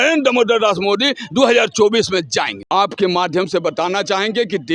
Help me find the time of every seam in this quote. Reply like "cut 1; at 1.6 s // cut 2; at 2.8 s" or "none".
cut 1; at 2.6 s